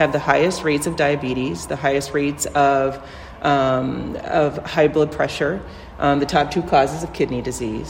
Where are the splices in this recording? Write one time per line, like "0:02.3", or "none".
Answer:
none